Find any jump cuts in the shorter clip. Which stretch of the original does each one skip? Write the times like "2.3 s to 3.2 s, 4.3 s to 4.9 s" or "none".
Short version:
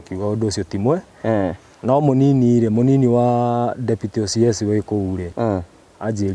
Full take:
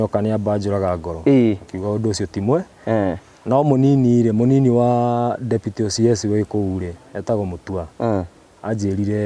6.9 s to 7.9 s